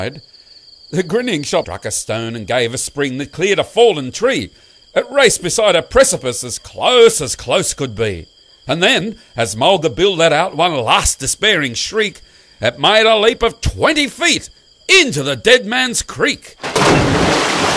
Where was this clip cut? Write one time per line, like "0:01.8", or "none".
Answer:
none